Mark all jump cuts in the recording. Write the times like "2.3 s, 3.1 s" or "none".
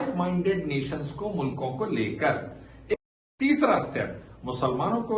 2.9 s

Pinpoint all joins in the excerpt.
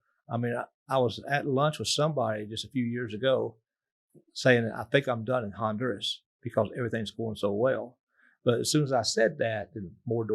none

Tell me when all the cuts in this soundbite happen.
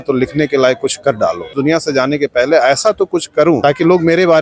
1.5 s, 3.6 s

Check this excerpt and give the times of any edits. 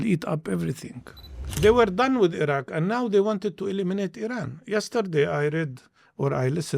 1.6 s

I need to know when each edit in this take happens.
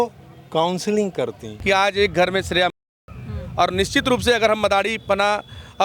1.5 s

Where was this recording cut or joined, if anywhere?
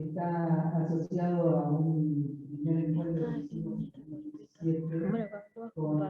none

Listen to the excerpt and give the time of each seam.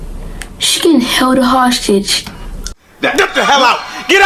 none

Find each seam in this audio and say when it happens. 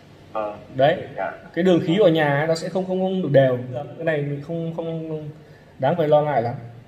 3.9 s

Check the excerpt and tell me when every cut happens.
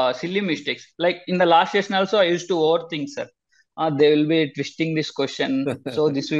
none

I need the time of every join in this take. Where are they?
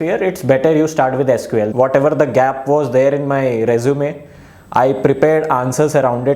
1.7 s

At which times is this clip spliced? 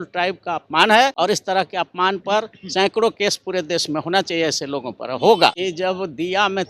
1.1 s, 5.6 s

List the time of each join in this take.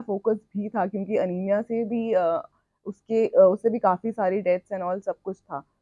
none

